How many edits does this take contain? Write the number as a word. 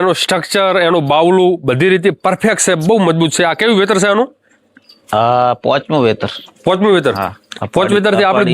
zero